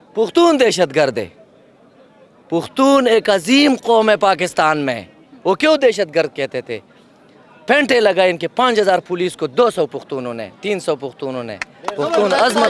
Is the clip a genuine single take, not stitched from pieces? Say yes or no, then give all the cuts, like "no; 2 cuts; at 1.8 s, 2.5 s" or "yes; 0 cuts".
yes; 0 cuts